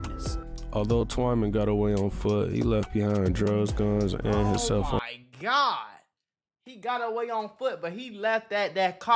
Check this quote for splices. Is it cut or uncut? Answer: uncut